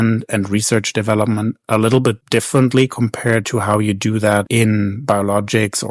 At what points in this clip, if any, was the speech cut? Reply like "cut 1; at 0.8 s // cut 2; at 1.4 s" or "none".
cut 1; at 4.5 s